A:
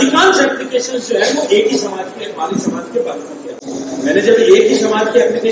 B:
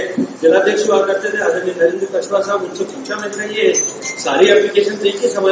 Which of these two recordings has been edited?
A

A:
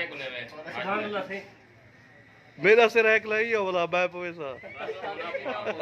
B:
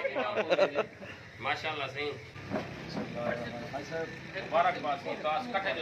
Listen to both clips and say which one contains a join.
B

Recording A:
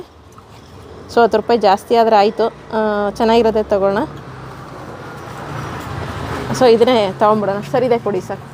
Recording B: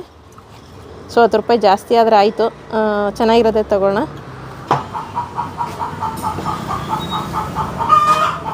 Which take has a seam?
B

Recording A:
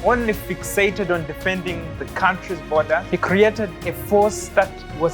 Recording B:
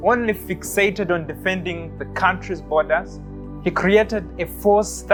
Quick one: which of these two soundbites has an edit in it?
A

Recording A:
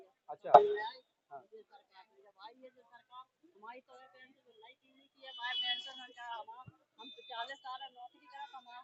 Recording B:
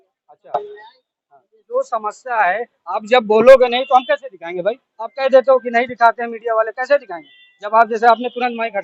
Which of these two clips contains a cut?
B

